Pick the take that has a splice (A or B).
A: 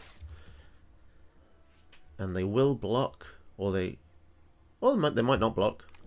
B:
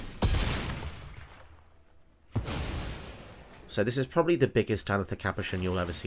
A